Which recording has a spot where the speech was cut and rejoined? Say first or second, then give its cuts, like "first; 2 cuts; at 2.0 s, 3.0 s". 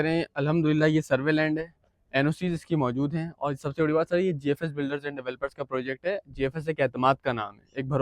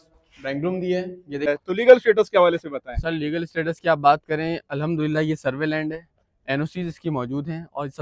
second; 1 cut; at 1.5 s